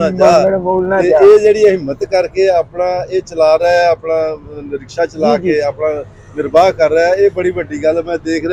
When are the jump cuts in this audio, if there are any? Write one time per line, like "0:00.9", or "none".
none